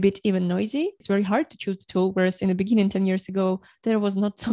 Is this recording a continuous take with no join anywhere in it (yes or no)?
no